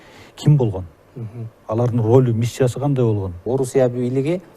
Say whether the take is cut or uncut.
cut